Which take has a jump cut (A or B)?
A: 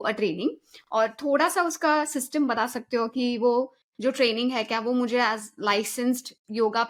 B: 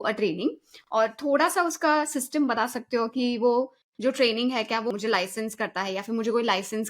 B